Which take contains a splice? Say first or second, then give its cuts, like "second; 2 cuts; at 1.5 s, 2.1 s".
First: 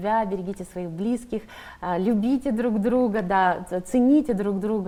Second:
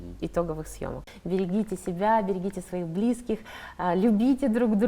second; 1 cut; at 1.0 s